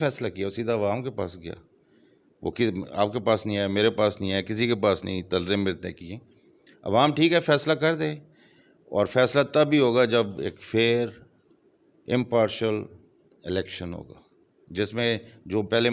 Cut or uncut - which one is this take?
uncut